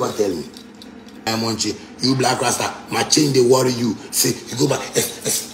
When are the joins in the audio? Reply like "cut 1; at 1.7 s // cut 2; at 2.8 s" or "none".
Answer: cut 1; at 1.3 s